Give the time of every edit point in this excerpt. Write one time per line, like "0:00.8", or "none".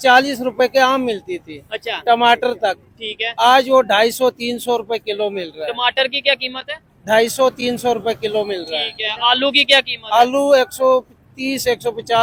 none